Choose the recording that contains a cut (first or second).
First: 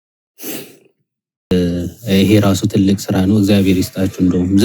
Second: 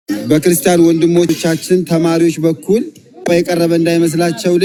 first